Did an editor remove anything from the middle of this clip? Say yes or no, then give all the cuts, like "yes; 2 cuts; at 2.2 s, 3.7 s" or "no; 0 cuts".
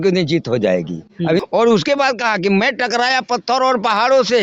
yes; 1 cut; at 1.4 s